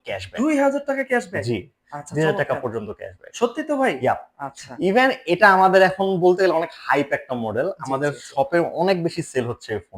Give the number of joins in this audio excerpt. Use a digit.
0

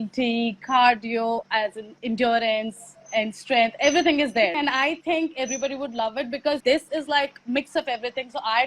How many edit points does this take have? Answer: 2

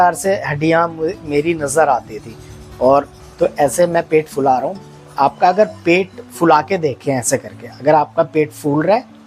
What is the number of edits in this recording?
1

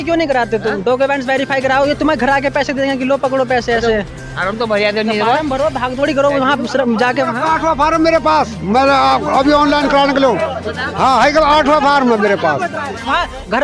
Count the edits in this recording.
0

